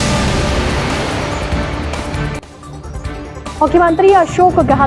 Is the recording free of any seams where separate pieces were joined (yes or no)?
no